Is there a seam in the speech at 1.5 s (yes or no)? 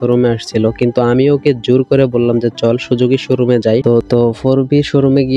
no